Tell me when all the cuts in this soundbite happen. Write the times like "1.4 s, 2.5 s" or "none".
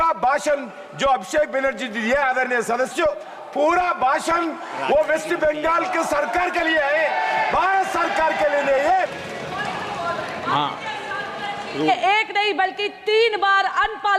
9.2 s

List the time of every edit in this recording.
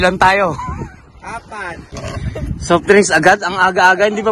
1.9 s

